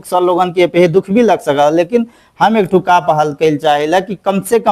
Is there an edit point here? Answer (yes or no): no